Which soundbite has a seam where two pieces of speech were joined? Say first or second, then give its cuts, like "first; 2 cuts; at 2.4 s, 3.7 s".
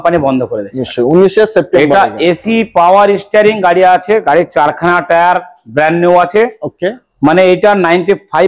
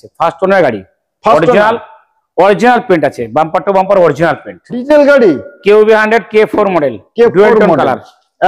second; 1 cut; at 4.9 s